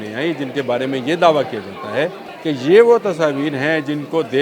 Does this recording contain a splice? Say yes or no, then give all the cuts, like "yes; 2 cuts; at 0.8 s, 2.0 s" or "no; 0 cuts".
yes; 1 cut; at 2.3 s